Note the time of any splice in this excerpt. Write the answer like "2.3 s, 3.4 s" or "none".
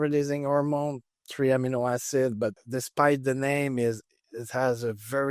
2.6 s